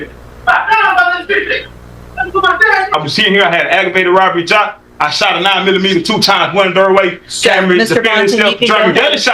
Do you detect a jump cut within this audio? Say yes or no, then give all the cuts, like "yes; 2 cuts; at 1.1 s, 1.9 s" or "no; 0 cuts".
yes; 1 cut; at 2.9 s